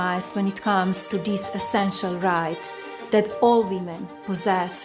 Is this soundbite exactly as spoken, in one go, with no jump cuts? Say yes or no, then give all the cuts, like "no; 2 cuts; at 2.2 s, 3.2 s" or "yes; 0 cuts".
yes; 0 cuts